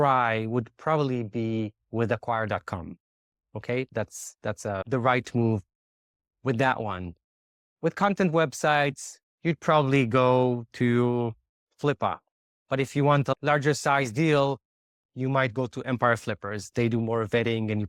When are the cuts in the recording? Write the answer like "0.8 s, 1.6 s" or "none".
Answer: none